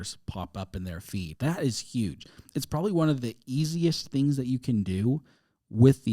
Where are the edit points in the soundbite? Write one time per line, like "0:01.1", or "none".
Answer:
0:01.3